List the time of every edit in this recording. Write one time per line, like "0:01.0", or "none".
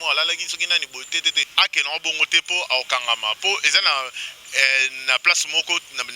0:01.4